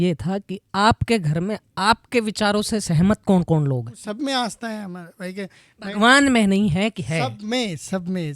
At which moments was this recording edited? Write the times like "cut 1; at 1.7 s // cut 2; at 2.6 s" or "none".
cut 1; at 3.9 s